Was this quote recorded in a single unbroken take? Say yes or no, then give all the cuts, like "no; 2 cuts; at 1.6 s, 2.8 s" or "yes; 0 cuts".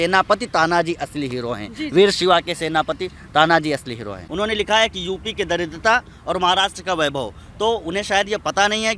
no; 1 cut; at 4.1 s